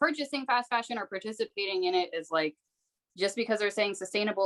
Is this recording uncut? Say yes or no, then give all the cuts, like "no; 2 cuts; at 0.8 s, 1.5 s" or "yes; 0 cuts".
yes; 0 cuts